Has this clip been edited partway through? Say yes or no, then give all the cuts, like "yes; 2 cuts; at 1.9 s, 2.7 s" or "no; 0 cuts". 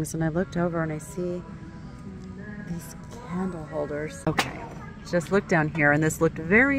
yes; 1 cut; at 4.2 s